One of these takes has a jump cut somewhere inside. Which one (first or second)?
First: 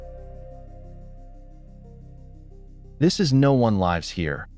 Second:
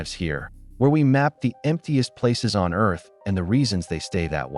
first